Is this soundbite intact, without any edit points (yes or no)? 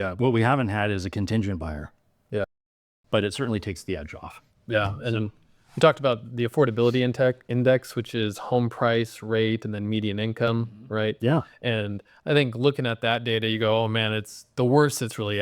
no